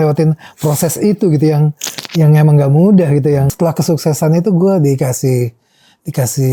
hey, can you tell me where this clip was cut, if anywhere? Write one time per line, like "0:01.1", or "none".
0:03.5